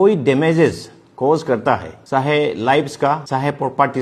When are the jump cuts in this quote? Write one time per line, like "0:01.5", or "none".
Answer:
0:01.9
0:03.2